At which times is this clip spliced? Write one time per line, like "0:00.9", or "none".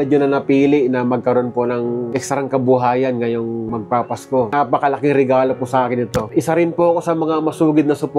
0:04.5
0:06.3

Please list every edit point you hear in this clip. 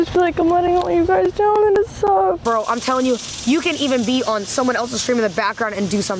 0:02.4

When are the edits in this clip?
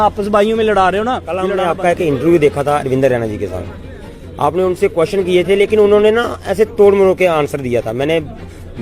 0:01.5

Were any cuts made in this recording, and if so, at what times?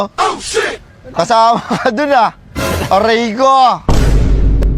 none

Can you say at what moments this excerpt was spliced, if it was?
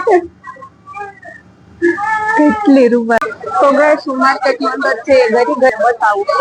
0:03.2

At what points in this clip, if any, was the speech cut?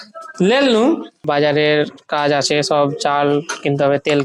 0:01.2

